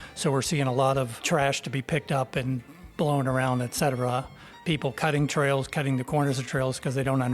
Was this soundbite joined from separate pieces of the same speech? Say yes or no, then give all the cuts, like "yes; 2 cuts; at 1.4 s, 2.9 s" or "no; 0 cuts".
yes; 1 cut; at 1.2 s